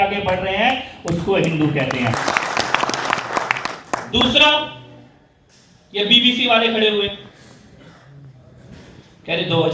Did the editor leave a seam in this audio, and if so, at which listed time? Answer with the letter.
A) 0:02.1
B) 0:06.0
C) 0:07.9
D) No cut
A